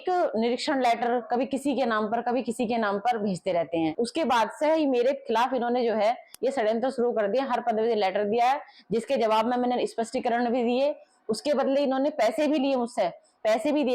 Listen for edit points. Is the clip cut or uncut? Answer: cut